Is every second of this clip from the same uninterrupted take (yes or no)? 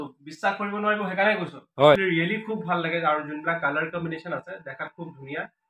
no